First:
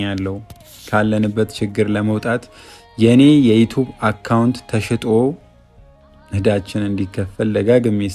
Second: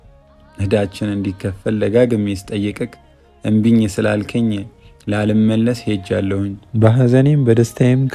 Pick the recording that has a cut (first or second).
second